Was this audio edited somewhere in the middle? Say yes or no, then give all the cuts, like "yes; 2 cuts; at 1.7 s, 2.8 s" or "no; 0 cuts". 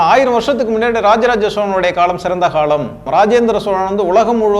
yes; 1 cut; at 3.1 s